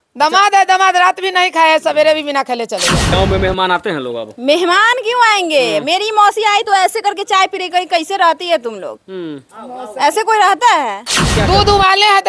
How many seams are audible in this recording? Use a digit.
2